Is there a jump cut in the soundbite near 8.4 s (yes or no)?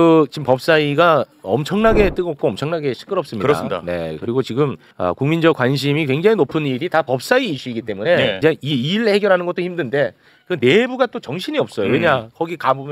yes